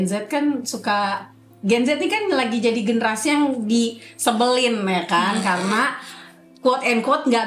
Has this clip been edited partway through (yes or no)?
no